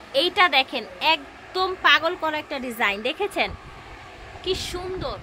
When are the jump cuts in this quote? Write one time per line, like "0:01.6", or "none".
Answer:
none